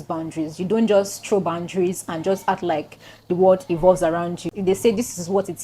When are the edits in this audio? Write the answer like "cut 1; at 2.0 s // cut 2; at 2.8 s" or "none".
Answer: cut 1; at 4.5 s